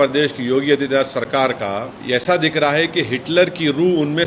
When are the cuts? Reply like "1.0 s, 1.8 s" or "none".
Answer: 1.9 s